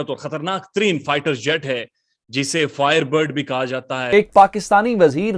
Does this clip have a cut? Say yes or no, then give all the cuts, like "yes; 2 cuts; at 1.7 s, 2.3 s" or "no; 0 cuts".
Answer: yes; 1 cut; at 4.0 s